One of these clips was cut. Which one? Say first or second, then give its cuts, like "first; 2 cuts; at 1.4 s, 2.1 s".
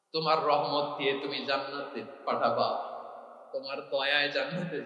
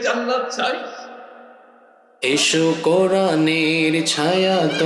second; 1 cut; at 2.1 s